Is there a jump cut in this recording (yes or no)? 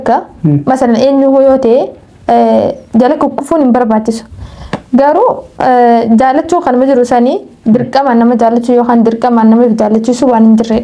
no